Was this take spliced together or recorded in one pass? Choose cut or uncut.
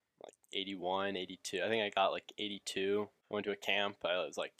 cut